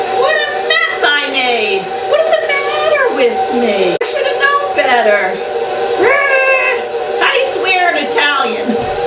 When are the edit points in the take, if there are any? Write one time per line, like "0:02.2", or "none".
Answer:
0:04.0